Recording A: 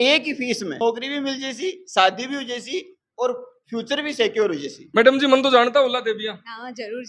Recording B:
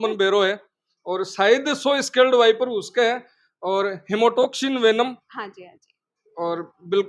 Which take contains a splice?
A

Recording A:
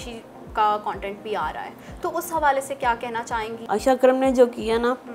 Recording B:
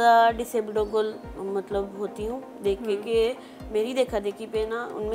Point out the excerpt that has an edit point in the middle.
A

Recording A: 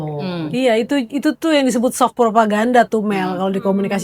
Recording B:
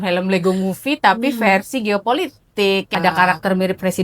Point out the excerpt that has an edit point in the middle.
B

